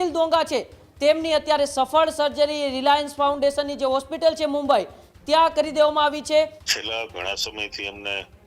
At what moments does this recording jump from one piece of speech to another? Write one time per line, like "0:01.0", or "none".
0:06.6